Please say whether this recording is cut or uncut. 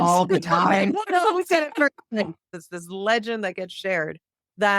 cut